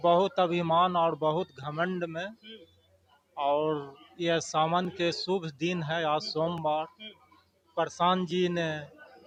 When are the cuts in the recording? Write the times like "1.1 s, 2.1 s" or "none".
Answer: none

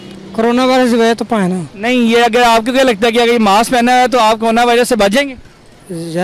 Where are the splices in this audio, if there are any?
none

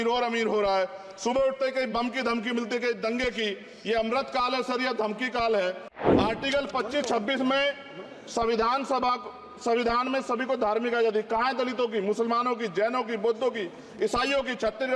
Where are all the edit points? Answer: 5.9 s

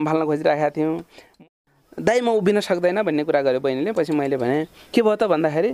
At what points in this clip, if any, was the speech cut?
1.3 s

